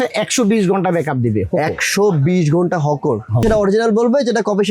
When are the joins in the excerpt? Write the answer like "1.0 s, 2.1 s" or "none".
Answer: 3.5 s